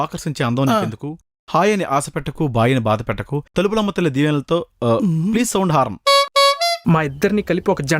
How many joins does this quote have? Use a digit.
1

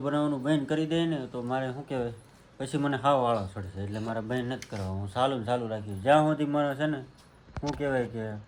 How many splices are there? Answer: 0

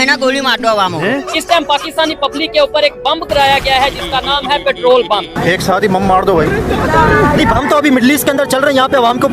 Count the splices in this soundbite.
2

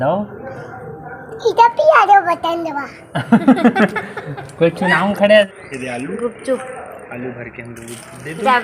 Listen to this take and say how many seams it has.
1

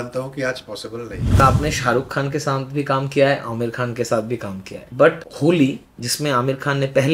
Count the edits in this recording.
2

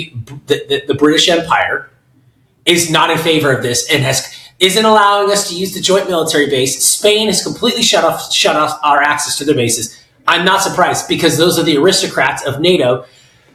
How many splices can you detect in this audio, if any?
0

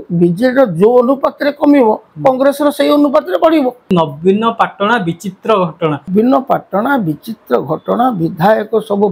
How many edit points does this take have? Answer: 2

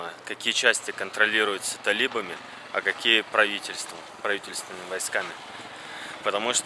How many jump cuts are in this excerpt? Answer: 0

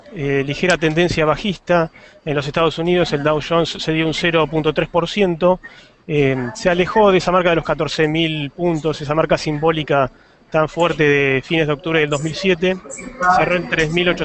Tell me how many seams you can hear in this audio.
1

